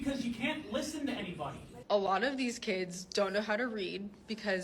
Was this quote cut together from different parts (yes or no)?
yes